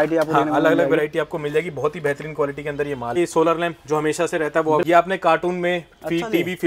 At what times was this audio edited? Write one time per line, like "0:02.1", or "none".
0:03.2
0:04.8